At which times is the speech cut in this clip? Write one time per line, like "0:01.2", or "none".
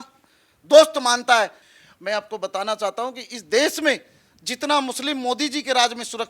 0:01.6